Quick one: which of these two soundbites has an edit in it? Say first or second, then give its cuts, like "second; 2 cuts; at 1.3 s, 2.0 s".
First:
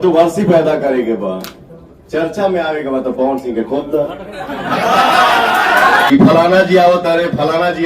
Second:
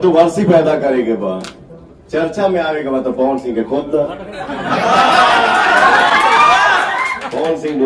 first; 1 cut; at 6.1 s